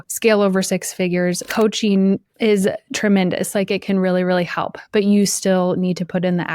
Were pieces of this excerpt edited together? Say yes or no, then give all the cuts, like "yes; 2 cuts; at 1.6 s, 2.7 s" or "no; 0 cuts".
yes; 2 cuts; at 1.4 s, 2.3 s